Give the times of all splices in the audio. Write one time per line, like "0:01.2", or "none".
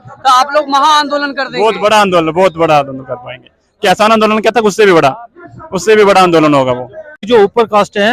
0:07.2